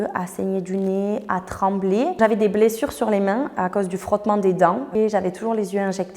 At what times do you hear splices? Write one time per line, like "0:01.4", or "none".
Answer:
0:02.2
0:04.8